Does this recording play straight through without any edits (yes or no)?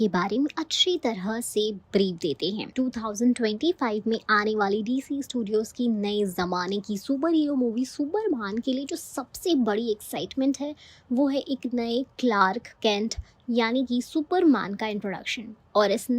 no